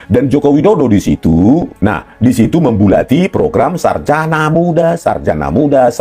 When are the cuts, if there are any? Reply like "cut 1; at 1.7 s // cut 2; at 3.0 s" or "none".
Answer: cut 1; at 1.7 s

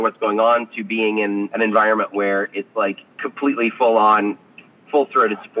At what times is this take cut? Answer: cut 1; at 1.5 s // cut 2; at 3.2 s

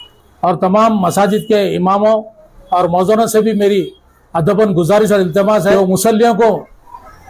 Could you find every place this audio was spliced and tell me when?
cut 1; at 5.7 s

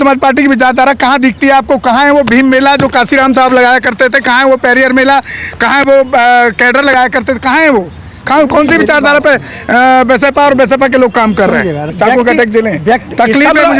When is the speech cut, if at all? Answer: cut 1; at 11.9 s

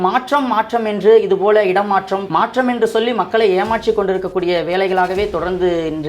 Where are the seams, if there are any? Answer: cut 1; at 2.2 s

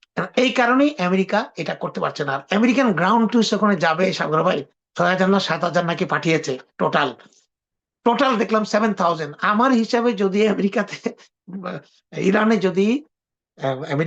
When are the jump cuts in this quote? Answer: none

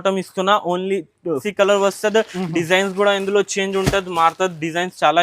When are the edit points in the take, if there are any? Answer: cut 1; at 1.4 s

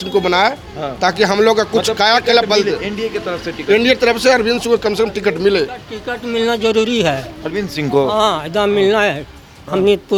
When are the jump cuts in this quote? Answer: none

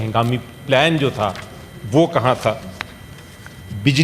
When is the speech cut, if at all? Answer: none

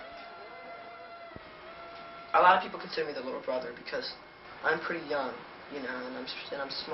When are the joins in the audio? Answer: cut 1; at 5.5 s

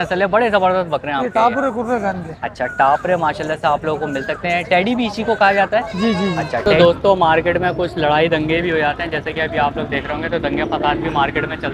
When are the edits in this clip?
cut 1; at 6.6 s

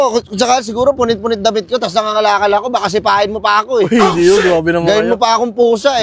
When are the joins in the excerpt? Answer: none

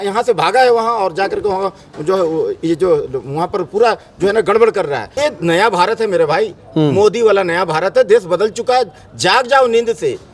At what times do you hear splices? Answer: cut 1; at 5.1 s

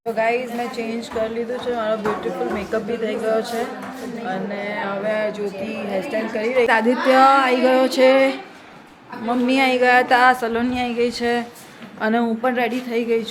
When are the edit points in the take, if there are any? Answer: cut 1; at 6.7 s

